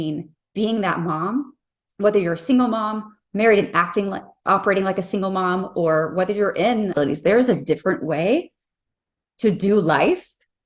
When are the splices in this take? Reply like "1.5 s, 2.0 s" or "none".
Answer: 7.0 s

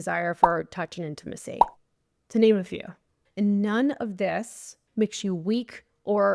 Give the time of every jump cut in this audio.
4.8 s

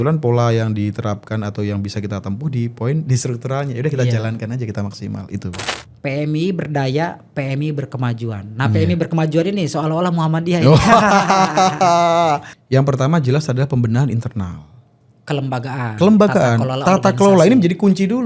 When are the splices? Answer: 5.6 s, 12.5 s

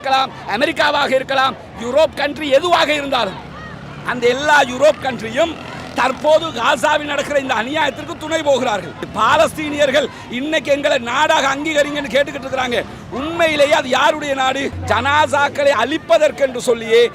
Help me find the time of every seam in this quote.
9.1 s, 14.7 s

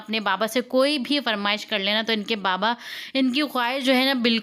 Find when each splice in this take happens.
none

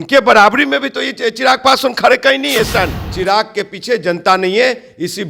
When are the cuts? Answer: 3.1 s

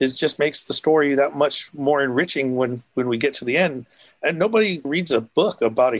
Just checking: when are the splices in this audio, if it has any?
4.8 s

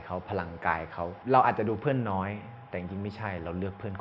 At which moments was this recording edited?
1.2 s

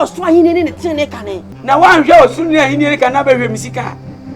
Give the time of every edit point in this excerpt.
1.5 s

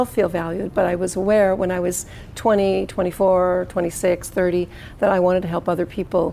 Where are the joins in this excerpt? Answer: none

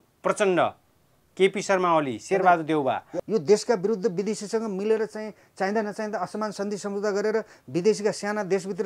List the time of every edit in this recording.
3.1 s

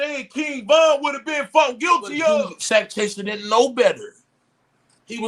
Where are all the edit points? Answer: 2.6 s

